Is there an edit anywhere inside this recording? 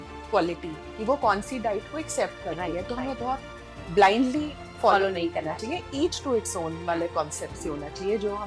no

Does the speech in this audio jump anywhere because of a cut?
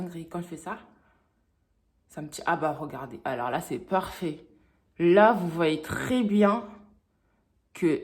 no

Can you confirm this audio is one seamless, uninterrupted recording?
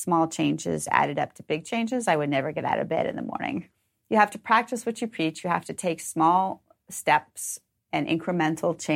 no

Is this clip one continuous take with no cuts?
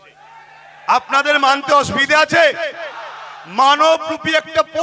yes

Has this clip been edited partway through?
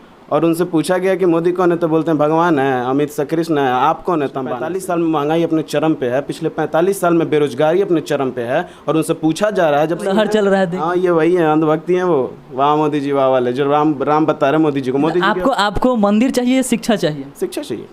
yes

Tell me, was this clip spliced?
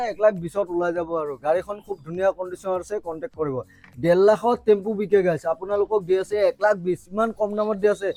no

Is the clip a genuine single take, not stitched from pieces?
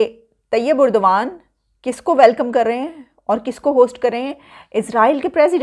yes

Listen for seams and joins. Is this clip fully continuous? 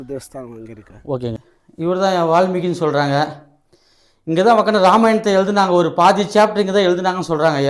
no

